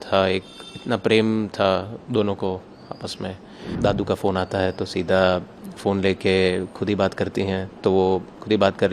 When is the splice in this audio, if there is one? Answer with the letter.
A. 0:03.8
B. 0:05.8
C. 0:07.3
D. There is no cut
A